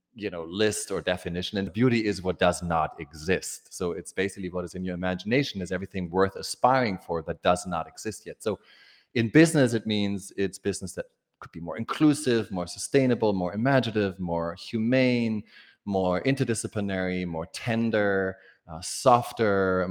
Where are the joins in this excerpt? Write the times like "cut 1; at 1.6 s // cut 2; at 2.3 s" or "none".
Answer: cut 1; at 1.7 s